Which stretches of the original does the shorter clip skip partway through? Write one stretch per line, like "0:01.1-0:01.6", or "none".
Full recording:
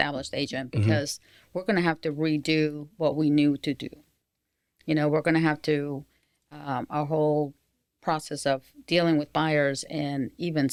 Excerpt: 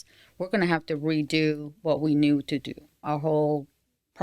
0:04.1-0:06.9